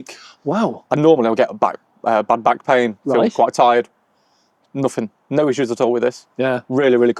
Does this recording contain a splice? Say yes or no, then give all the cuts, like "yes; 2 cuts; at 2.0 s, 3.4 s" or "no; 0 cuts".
no; 0 cuts